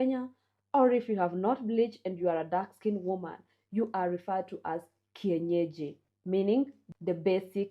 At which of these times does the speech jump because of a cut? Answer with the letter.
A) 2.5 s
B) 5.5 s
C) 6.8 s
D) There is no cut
C